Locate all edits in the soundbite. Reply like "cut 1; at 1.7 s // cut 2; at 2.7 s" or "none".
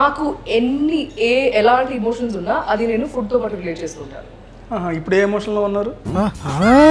none